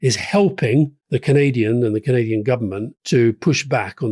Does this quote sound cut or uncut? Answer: uncut